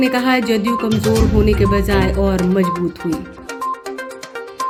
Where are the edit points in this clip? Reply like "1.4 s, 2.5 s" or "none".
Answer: none